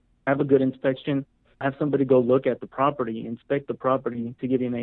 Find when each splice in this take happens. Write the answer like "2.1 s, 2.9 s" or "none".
1.4 s